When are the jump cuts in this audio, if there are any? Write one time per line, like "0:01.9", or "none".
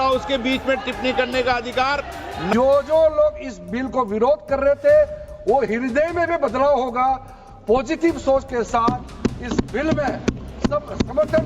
0:02.5